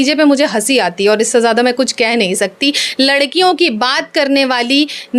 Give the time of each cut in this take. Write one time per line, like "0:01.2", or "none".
none